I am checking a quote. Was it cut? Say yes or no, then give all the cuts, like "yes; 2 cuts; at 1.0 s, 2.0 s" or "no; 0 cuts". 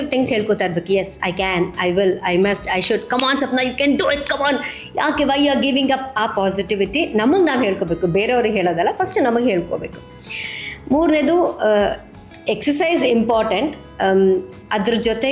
no; 0 cuts